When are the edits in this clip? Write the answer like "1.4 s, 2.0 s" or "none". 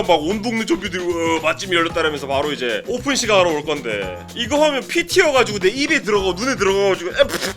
2.9 s, 4.2 s